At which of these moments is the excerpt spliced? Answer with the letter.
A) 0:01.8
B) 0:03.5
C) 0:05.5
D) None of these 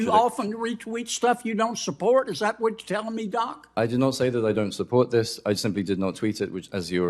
D